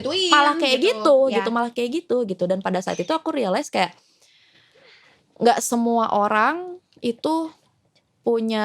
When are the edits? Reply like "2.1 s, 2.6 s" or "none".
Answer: none